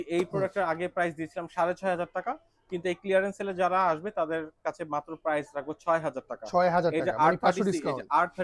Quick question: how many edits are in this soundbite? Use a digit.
0